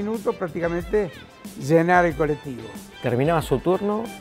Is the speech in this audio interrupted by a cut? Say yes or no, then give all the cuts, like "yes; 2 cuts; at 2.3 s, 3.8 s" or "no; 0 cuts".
yes; 1 cut; at 3.0 s